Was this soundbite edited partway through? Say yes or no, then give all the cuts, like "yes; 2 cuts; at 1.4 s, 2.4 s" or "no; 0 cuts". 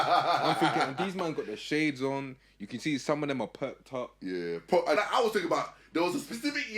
yes; 1 cut; at 5.0 s